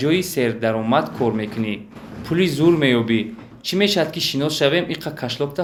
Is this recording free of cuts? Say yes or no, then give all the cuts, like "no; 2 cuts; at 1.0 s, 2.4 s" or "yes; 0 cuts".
yes; 0 cuts